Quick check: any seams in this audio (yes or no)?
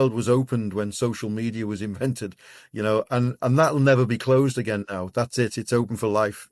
no